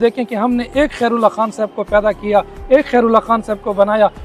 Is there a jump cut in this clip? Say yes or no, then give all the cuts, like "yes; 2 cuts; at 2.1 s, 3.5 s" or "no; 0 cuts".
no; 0 cuts